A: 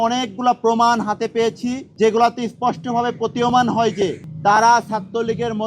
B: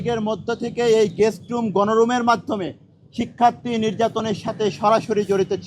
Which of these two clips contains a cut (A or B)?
A